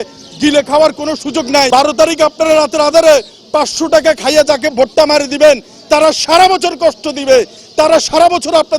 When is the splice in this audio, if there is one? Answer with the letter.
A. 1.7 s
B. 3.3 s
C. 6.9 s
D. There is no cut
A